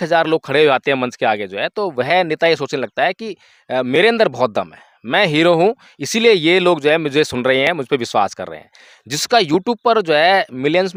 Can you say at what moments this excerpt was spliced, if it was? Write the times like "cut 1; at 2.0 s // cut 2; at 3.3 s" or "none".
none